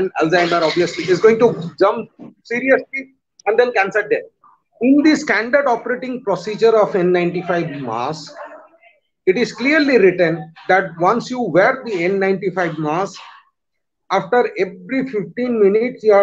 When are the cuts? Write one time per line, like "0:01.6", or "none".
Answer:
0:04.3